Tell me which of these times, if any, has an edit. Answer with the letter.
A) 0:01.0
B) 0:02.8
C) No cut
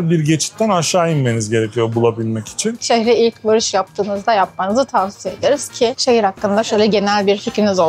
B